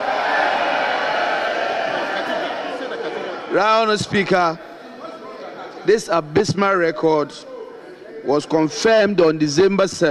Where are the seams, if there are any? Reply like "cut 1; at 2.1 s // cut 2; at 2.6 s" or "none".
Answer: none